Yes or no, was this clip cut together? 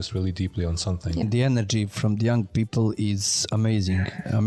yes